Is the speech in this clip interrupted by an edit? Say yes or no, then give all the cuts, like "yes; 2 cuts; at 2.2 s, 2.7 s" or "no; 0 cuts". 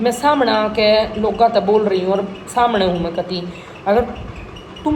no; 0 cuts